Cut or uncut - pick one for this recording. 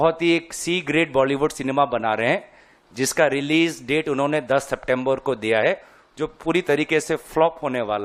uncut